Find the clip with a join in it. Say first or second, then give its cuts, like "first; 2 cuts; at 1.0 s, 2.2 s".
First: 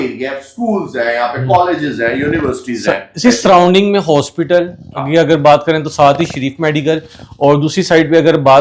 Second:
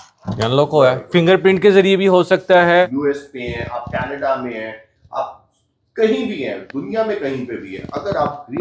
second; 1 cut; at 2.9 s